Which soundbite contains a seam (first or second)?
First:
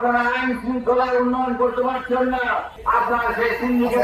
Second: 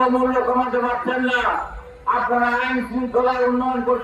first